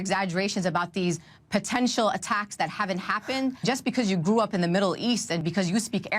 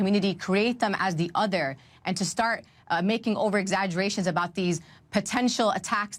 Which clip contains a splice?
first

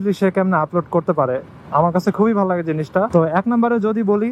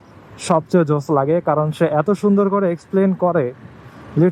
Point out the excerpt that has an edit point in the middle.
first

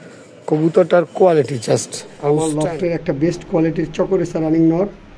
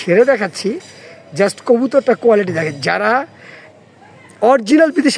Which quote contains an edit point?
first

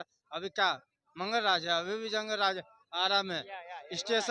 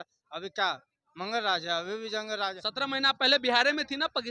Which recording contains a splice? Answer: second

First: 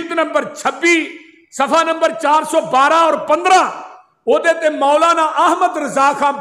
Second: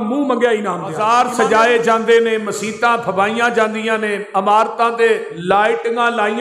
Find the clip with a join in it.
second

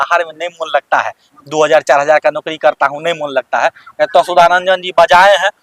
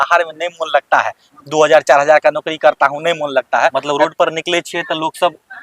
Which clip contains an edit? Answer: second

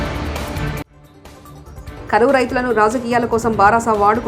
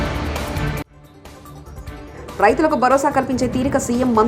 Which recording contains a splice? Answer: second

